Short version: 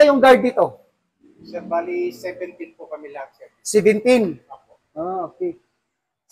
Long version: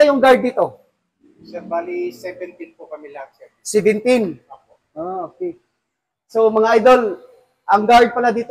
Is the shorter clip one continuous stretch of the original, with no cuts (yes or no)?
yes